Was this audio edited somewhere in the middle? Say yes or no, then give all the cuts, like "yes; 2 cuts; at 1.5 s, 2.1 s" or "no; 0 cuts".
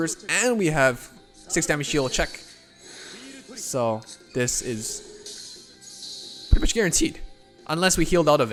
no; 0 cuts